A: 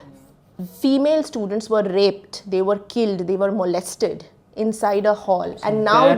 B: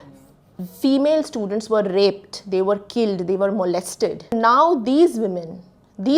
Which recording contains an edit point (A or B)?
B